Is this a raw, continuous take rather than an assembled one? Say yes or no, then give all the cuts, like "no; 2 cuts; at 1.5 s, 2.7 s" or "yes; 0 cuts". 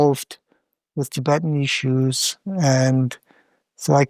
yes; 0 cuts